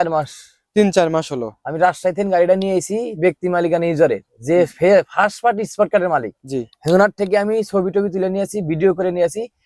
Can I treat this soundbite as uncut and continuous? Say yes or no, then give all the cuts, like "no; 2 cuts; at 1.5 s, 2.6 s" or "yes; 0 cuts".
yes; 0 cuts